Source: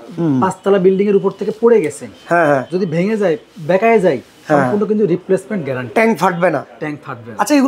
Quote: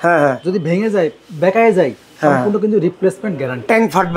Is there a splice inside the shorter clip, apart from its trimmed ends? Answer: no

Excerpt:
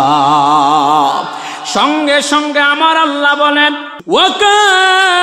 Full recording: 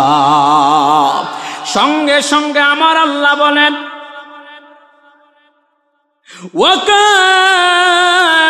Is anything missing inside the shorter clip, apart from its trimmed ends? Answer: yes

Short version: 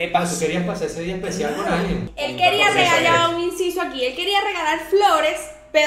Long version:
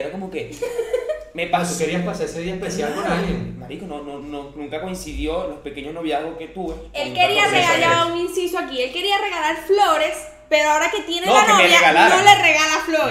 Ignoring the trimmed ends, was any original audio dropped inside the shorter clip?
yes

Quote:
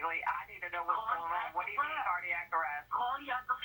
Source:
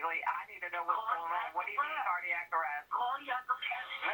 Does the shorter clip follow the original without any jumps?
yes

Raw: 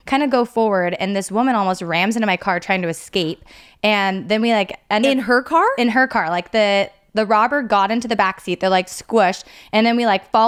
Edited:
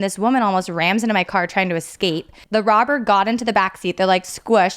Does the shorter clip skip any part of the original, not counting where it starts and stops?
yes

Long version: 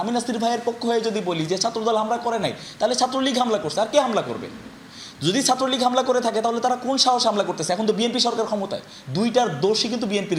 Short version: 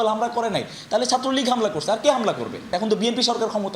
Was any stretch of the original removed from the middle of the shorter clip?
yes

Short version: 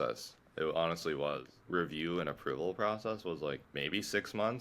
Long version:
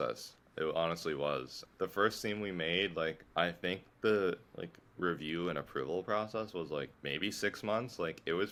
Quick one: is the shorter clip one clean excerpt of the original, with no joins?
no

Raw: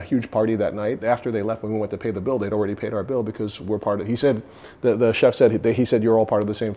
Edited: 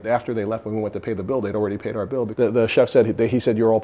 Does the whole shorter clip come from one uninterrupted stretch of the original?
no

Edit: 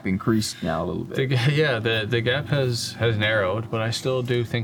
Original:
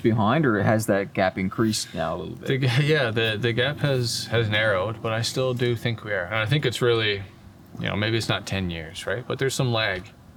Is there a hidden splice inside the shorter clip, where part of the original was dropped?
no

